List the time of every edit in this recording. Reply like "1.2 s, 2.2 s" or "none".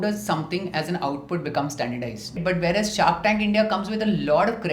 2.4 s